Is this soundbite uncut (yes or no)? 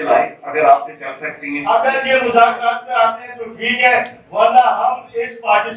no